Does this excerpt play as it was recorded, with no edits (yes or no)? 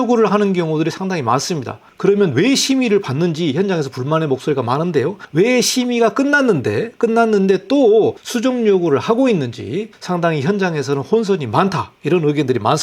no